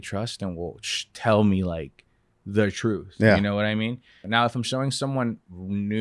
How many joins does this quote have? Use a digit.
1